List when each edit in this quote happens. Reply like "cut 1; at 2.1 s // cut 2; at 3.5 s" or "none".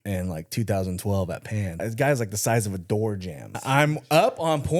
cut 1; at 1.8 s // cut 2; at 3.6 s